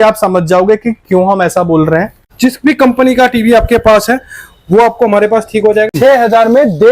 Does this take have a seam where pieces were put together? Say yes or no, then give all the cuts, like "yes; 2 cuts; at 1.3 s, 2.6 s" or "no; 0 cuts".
yes; 2 cuts; at 2.3 s, 5.9 s